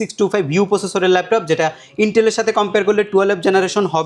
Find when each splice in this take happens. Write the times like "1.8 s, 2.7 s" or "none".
none